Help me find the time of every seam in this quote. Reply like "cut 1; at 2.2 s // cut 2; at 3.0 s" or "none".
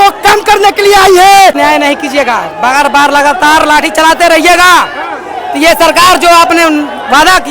cut 1; at 1.6 s